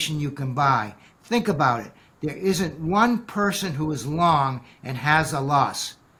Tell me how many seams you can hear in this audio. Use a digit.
0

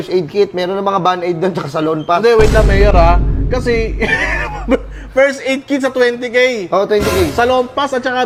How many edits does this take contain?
0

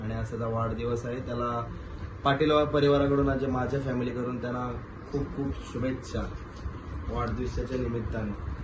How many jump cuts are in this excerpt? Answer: 0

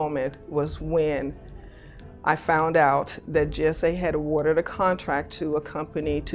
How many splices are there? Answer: 0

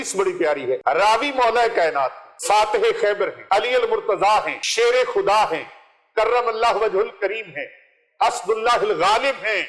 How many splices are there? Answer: 4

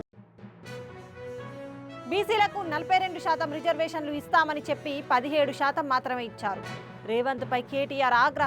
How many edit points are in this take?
1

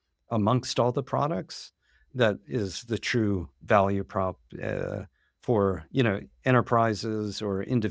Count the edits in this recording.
1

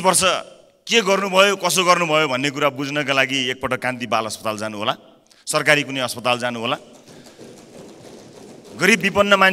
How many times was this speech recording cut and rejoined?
0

